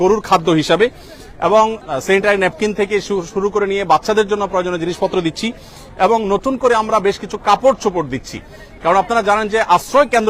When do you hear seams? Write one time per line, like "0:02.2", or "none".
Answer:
none